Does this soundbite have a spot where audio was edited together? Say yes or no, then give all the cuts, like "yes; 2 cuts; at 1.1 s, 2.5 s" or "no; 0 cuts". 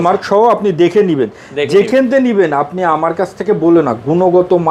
no; 0 cuts